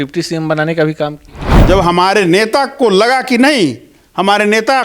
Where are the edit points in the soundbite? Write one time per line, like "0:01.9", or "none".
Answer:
0:01.5